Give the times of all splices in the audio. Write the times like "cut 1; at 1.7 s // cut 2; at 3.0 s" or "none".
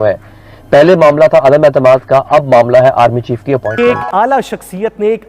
cut 1; at 3.7 s